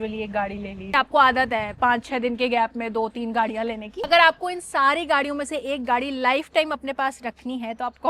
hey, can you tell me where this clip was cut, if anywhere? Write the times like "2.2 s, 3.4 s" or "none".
0.9 s, 4.0 s